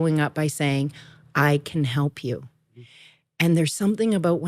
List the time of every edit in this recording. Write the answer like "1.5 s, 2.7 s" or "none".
none